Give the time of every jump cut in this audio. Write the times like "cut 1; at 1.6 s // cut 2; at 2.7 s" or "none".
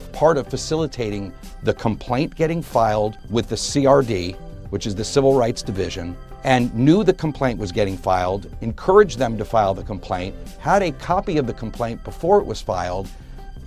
none